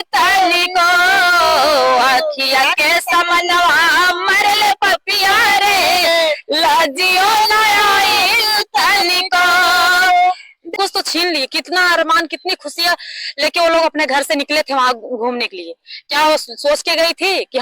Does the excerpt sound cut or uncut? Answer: cut